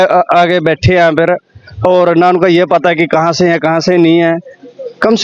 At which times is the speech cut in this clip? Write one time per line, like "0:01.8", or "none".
none